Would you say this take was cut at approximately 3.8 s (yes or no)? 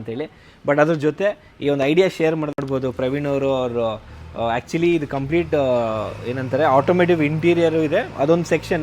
no